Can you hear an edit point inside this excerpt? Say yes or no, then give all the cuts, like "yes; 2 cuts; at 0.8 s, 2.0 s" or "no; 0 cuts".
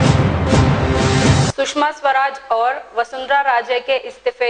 yes; 1 cut; at 1.5 s